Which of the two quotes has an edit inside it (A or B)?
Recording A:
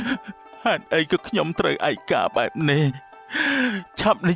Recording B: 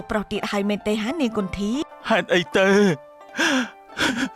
B